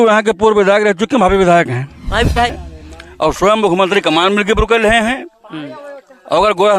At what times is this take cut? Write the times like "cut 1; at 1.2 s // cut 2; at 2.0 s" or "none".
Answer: cut 1; at 2.6 s